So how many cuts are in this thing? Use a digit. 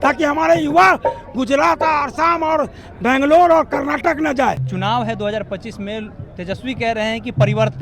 1